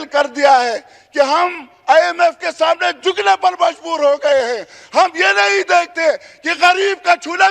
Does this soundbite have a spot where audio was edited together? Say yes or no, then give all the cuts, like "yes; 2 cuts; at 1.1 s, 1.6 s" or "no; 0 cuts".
no; 0 cuts